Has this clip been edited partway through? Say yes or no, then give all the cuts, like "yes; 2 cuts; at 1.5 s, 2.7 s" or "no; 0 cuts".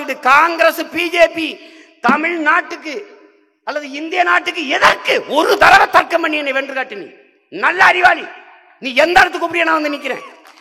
no; 0 cuts